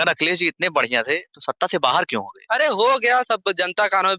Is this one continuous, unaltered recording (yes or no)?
yes